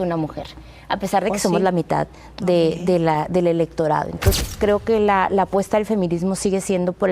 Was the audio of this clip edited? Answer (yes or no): yes